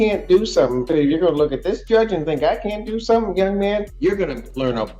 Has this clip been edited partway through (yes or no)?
yes